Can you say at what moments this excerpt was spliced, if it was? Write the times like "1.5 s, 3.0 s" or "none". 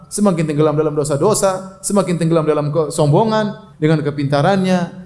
3.6 s

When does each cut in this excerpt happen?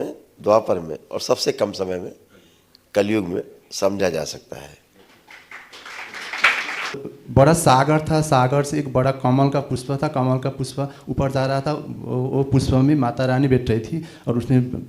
7.0 s

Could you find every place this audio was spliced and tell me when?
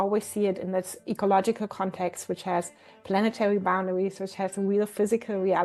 none

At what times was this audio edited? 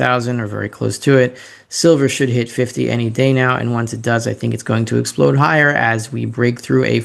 none

